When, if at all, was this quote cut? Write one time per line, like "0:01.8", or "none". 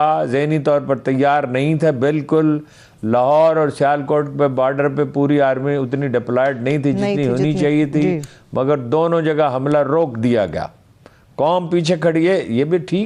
none